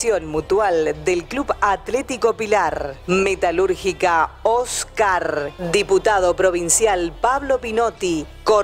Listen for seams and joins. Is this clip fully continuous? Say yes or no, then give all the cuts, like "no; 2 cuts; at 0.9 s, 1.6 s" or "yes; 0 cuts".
yes; 0 cuts